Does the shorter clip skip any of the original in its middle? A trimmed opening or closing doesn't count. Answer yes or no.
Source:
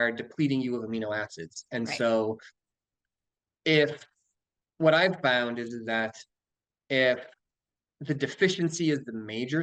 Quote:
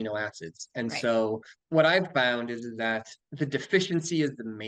yes